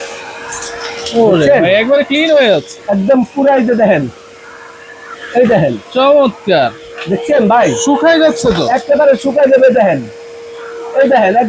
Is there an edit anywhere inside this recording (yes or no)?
no